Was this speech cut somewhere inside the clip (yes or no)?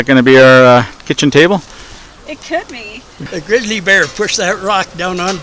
yes